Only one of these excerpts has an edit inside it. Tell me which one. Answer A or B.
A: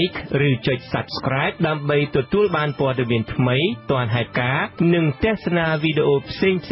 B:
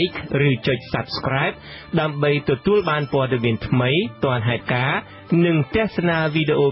A